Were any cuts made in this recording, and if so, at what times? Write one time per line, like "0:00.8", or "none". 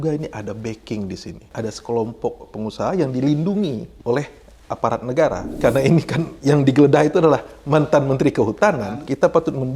0:01.5
0:02.5
0:03.9
0:05.6
0:08.8